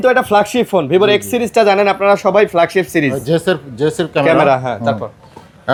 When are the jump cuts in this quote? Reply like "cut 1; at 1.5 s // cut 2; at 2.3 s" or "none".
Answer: none